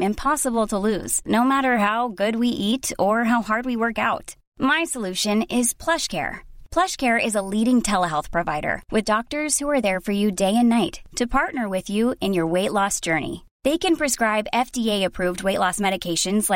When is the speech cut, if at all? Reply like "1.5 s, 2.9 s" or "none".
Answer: none